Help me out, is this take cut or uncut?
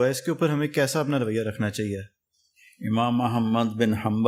uncut